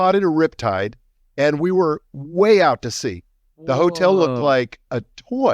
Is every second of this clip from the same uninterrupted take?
yes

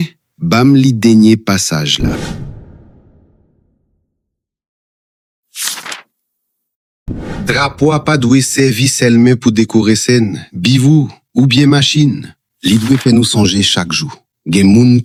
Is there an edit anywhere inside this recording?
no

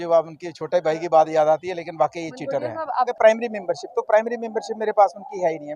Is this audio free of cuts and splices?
no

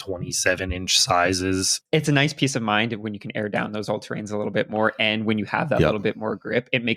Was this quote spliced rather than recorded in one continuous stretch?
yes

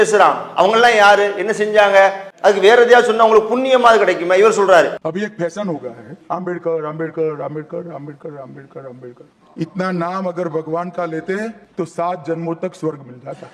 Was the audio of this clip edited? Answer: yes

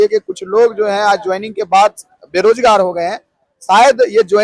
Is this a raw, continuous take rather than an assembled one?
yes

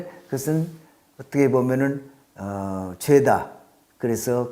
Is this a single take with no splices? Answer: yes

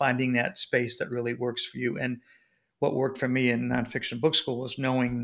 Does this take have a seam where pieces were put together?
no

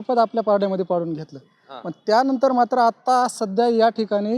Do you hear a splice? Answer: no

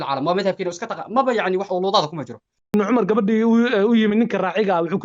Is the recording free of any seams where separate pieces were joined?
no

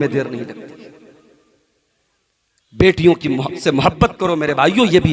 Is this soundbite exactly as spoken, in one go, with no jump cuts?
yes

